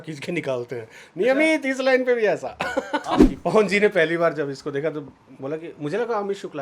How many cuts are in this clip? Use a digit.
1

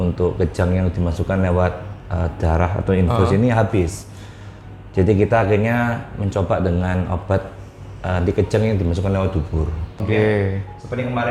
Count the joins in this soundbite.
1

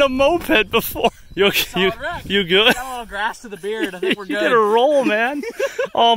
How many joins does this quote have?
1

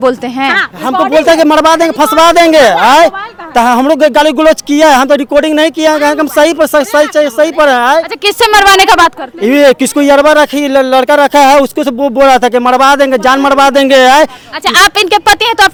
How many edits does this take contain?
0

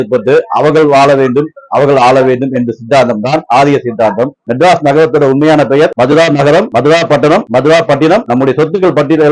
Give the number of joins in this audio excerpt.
1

